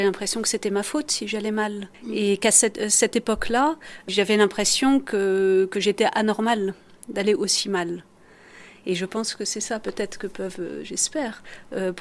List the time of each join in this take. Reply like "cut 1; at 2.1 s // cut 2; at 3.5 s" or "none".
cut 1; at 1.9 s // cut 2; at 4.1 s